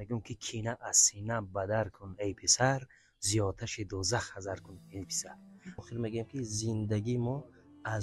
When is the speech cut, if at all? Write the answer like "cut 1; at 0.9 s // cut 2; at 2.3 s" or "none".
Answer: cut 1; at 5.8 s